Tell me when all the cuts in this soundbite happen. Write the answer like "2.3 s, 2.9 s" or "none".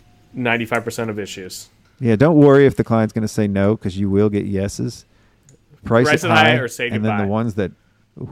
none